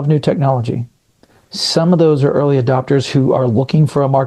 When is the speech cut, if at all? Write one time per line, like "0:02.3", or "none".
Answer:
none